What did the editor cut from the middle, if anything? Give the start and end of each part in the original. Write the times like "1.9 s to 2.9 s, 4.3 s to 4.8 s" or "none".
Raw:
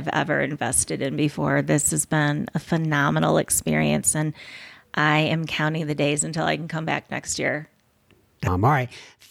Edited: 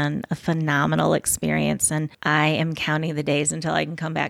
4.4 s to 4.9 s